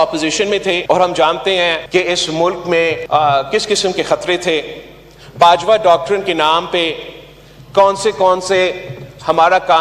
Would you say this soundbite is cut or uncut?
cut